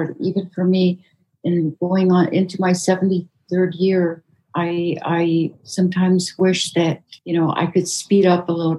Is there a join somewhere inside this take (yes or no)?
no